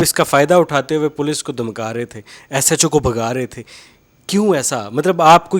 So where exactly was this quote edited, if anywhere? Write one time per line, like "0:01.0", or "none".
none